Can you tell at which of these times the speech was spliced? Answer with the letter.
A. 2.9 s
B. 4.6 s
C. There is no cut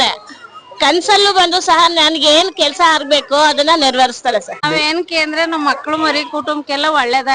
B